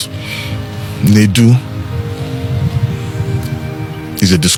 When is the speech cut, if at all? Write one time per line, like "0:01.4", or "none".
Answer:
none